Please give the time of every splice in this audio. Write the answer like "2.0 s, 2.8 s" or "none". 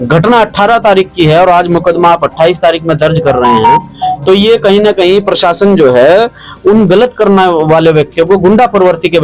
none